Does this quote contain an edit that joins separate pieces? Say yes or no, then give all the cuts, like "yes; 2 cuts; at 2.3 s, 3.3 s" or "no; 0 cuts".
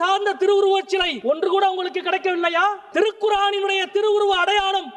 yes; 2 cuts; at 1.1 s, 2.8 s